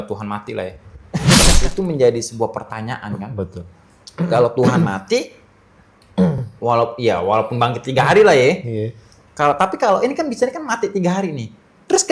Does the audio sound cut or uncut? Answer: cut